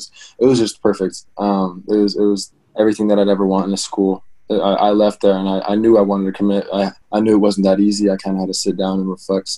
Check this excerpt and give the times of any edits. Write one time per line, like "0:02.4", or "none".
0:02.6
0:07.0